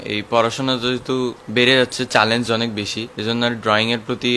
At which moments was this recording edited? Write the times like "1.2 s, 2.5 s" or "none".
1.4 s, 3.0 s